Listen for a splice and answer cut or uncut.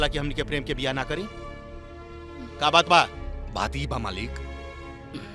uncut